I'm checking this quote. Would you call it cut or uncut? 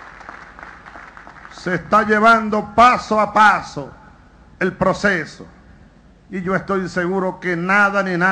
cut